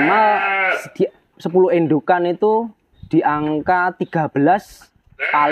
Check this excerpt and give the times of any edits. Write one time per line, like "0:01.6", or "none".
none

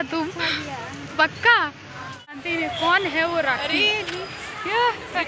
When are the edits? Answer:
0:02.3

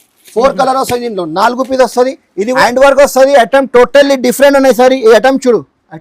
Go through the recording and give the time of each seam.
0:02.6

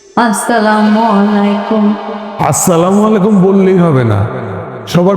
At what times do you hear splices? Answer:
0:02.3

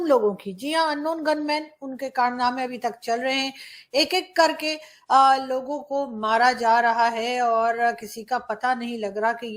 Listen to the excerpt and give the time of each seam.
none

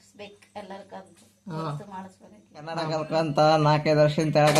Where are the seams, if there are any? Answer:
0:02.8

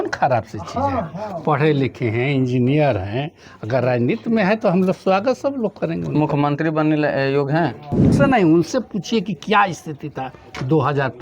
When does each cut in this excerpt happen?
0:08.2

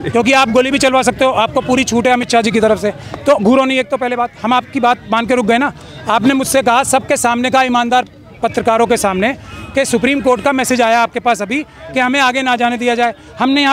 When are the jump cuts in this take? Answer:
none

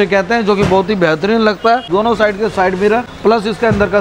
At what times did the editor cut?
0:01.9
0:03.1

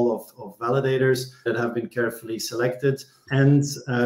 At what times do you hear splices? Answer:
0:01.4
0:03.1

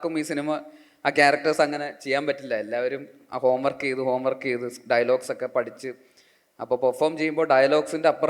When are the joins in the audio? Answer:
none

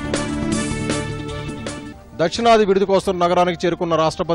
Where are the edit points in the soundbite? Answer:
0:01.9

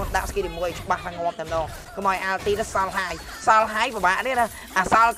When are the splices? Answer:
none

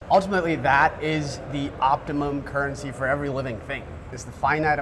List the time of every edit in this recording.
none

